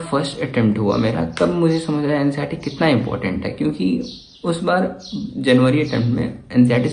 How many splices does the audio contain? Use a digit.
0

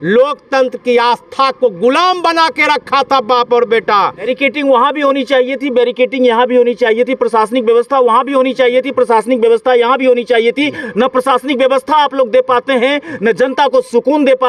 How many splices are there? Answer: 1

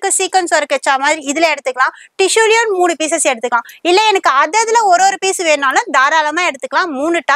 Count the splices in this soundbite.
0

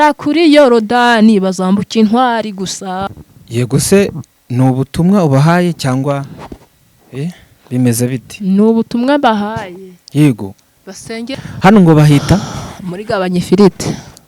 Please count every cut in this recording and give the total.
2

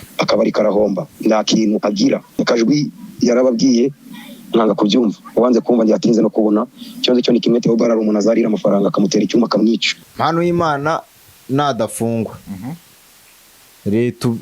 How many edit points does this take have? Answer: 2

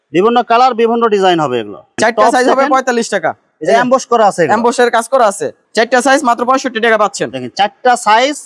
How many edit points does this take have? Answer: 2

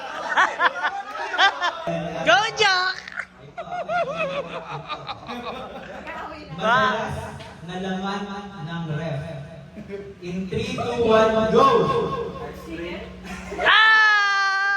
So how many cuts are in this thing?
1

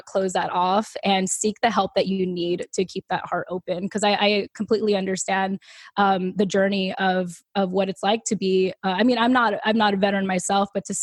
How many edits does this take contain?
0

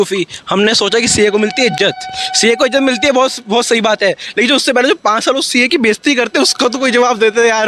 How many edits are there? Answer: 0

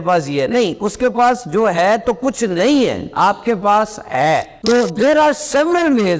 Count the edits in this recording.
1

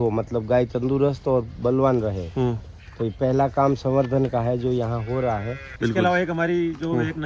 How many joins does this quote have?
1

